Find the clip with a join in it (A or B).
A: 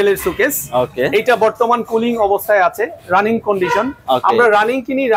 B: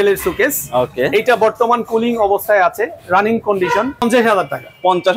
B